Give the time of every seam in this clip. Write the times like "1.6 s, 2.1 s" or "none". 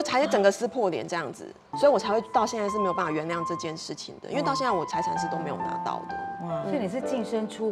1.7 s